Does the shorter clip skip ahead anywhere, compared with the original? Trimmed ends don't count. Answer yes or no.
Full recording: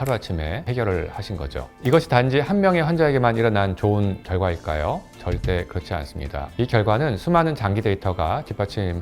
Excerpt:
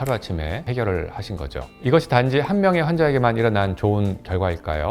no